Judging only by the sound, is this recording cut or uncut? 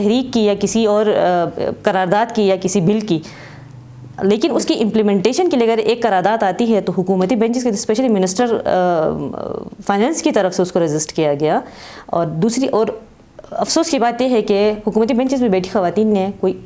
uncut